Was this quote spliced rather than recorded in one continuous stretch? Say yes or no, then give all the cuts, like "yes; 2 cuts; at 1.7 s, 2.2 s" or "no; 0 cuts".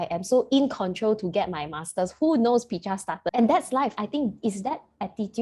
yes; 2 cuts; at 3.2 s, 4.0 s